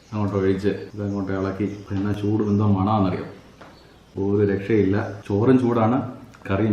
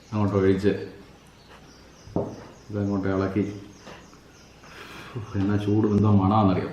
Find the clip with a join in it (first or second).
first